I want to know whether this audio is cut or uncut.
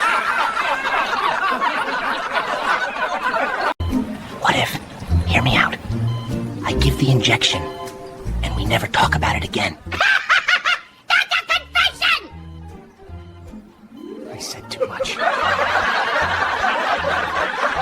cut